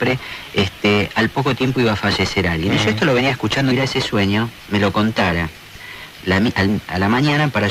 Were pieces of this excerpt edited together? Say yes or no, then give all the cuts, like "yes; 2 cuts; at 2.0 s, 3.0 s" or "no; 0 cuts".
no; 0 cuts